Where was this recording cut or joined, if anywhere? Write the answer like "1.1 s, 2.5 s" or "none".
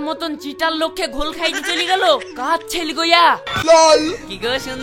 3.5 s